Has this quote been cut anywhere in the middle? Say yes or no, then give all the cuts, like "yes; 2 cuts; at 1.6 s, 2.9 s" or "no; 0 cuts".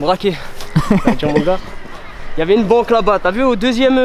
no; 0 cuts